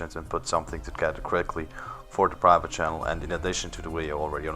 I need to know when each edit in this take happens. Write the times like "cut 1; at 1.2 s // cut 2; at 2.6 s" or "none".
cut 1; at 3.1 s